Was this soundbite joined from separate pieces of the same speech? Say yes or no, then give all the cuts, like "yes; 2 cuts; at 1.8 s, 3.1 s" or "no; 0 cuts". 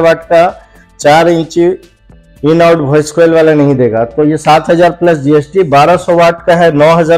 no; 0 cuts